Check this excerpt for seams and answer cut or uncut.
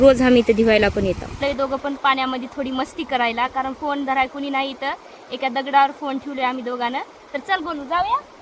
cut